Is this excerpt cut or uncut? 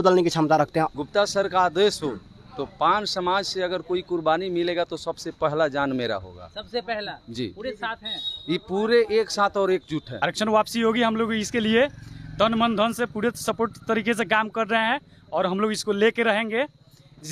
cut